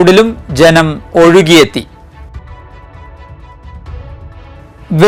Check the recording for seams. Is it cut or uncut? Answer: uncut